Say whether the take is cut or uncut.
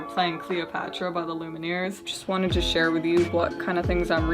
cut